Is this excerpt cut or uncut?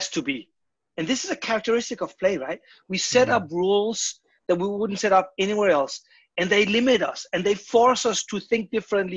uncut